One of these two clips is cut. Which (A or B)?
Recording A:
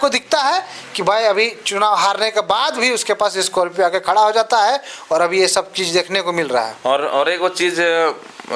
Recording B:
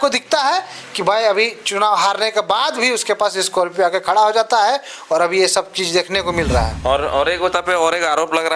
B